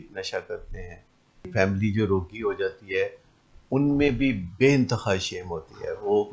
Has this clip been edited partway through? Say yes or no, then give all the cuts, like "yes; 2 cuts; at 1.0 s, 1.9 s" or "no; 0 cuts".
yes; 1 cut; at 1.5 s